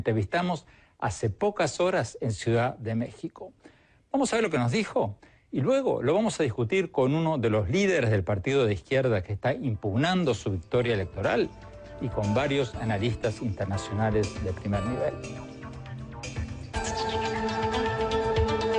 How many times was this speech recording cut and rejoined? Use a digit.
1